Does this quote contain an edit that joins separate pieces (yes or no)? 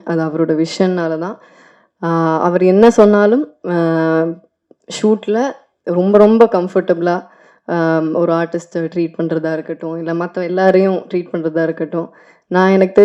no